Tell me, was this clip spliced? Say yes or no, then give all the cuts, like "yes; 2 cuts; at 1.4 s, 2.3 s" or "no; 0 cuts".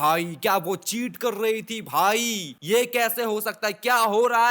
no; 0 cuts